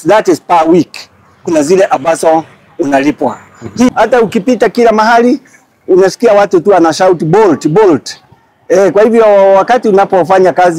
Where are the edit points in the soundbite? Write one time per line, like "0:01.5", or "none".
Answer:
0:03.9